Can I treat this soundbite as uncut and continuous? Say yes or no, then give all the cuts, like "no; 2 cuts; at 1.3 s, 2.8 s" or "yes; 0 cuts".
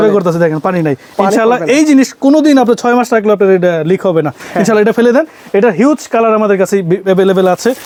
yes; 0 cuts